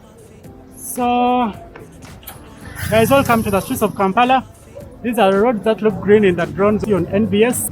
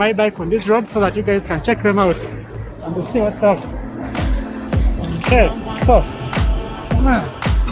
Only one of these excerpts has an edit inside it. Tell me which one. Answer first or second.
first